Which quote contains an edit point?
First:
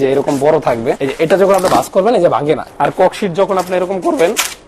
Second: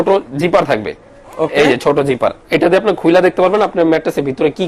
first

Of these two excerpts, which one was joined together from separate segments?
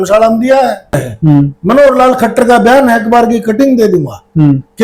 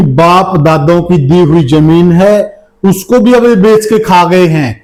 first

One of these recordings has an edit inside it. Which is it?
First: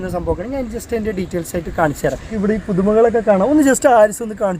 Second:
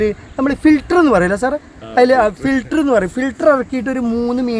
first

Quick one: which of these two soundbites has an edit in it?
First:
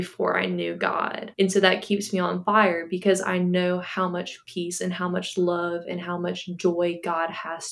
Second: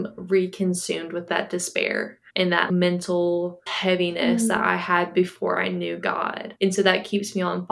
second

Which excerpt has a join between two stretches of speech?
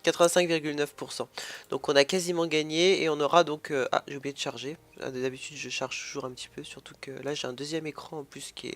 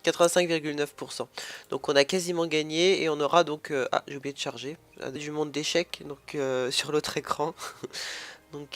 first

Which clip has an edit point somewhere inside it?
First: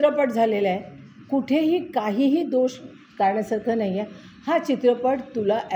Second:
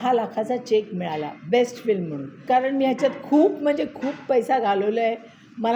second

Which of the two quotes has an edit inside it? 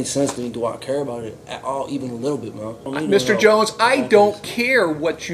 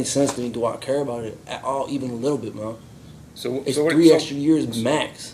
first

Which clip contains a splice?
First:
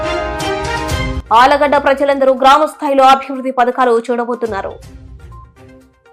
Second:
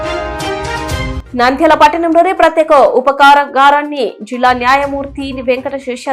second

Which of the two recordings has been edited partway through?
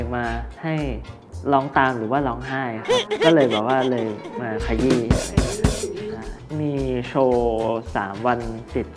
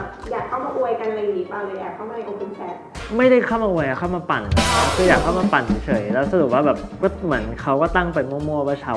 first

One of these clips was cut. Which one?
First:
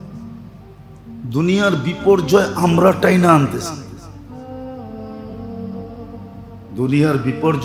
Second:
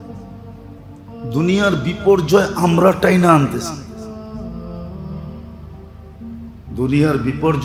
second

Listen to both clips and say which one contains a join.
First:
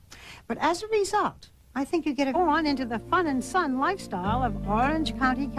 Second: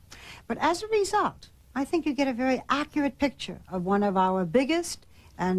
second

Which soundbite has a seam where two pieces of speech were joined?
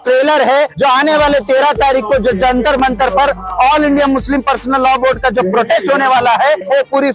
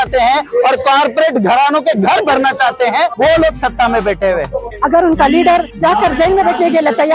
second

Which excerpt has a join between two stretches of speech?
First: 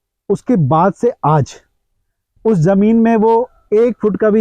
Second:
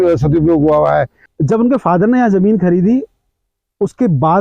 second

